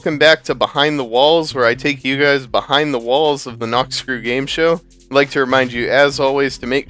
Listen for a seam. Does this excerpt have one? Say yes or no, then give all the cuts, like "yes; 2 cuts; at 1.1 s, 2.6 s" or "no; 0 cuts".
no; 0 cuts